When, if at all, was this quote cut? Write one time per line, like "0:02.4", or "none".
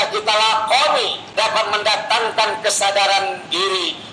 0:01.2